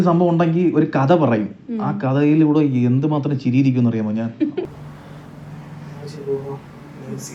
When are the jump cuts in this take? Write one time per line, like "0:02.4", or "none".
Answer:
0:04.7